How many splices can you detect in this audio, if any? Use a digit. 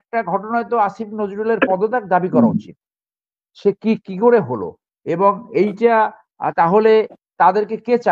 0